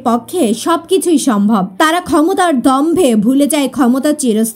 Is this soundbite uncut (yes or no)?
no